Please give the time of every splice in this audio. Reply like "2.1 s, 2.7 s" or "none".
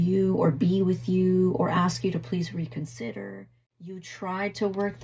4.1 s